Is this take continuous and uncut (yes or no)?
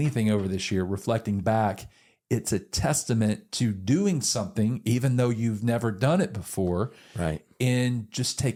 yes